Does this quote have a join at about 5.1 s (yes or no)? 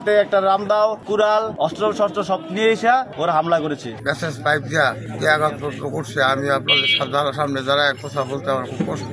yes